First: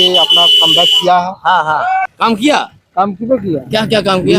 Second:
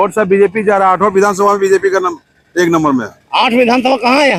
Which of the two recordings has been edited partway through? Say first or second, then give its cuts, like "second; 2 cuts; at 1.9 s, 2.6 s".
first; 1 cut; at 2.1 s